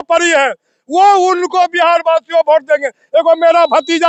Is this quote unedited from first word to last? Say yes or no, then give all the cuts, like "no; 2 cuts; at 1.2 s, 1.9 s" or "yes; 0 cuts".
yes; 0 cuts